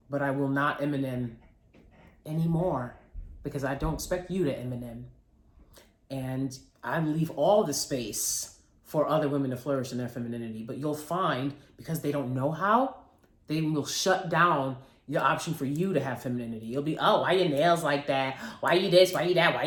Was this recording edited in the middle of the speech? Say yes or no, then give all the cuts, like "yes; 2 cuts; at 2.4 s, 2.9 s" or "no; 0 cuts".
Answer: no; 0 cuts